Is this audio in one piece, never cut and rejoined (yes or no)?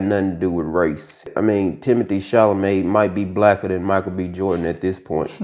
no